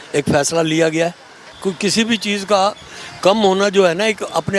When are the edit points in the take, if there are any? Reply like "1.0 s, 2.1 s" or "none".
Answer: 1.6 s